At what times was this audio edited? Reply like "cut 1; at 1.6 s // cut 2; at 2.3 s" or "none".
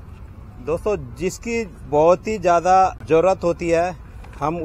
cut 1; at 3.0 s